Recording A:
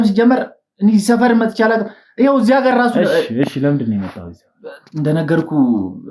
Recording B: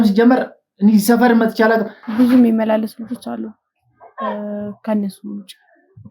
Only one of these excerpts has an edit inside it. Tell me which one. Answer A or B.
B